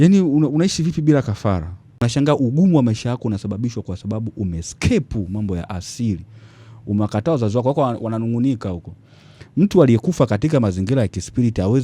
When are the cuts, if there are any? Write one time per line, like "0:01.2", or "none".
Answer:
0:02.1